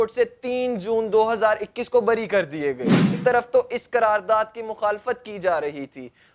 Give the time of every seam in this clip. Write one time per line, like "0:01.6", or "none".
0:03.2